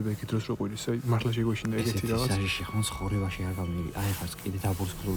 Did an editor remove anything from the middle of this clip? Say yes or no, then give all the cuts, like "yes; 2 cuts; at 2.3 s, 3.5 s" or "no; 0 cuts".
no; 0 cuts